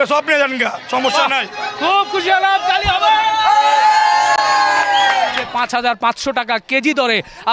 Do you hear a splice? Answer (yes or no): yes